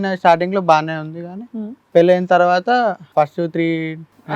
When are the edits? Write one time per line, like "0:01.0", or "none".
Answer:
0:03.1